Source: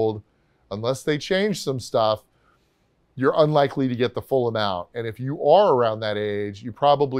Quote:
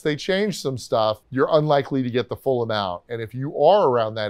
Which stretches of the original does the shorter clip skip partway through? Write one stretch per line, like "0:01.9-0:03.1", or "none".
0:02.3-0:03.1